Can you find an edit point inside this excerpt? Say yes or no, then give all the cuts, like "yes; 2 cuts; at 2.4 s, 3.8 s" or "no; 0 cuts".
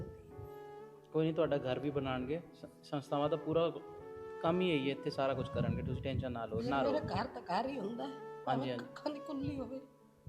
no; 0 cuts